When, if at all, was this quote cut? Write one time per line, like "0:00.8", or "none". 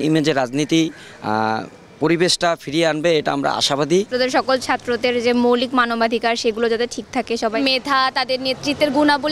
0:04.1
0:07.6